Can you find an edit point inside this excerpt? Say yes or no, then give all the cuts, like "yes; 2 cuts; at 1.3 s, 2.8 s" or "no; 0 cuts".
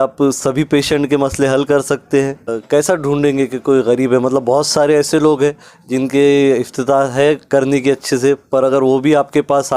yes; 1 cut; at 2.6 s